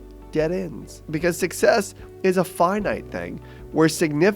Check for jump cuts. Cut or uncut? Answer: cut